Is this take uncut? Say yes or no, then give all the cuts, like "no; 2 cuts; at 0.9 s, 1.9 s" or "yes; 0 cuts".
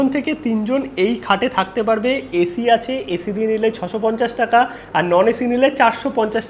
yes; 0 cuts